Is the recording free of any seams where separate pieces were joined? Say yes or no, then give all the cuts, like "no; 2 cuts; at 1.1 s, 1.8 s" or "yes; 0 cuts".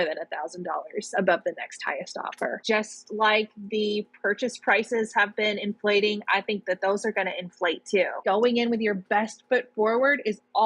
no; 2 cuts; at 2.6 s, 8.2 s